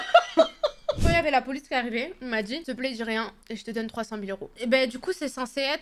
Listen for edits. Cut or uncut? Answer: cut